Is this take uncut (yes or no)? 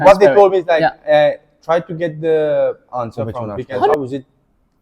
no